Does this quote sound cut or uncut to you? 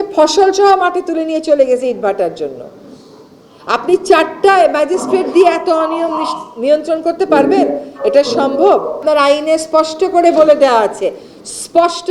cut